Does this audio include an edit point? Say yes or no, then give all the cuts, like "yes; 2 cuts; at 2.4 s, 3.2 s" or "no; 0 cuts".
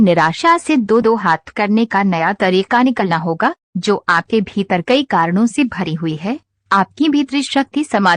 no; 0 cuts